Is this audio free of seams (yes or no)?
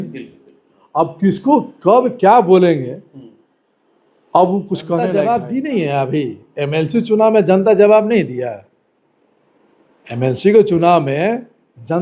no